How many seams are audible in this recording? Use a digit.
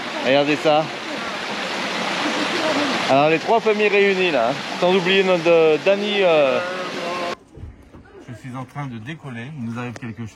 1